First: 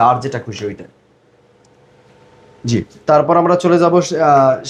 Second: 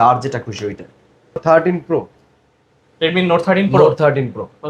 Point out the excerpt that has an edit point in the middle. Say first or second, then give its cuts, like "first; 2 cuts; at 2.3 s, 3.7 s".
second; 1 cut; at 1.4 s